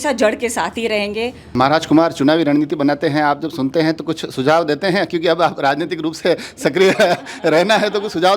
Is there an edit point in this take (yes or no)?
yes